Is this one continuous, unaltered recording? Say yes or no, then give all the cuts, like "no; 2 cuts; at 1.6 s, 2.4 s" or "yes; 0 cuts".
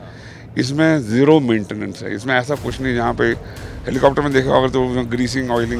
yes; 0 cuts